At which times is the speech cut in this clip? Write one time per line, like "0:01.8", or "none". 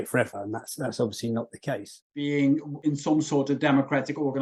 0:01.9